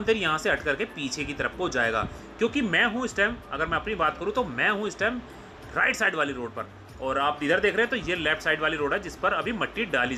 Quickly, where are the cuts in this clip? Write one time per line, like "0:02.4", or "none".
none

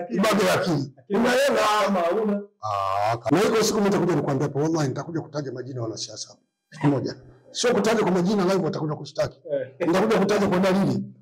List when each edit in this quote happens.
0:03.2

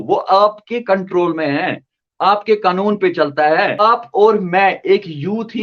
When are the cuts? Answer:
0:03.8

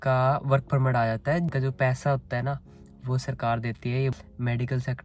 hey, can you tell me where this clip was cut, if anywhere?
0:01.5
0:04.2

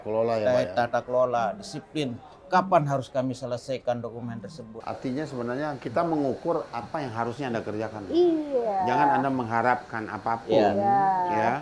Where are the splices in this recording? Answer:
0:04.8

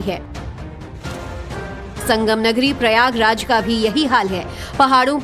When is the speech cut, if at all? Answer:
0:03.6

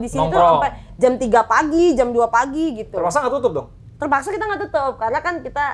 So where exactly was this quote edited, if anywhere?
none

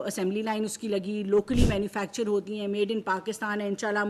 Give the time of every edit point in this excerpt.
none

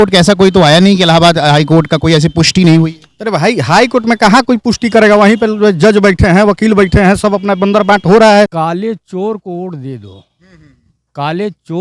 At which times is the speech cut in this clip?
0:08.6

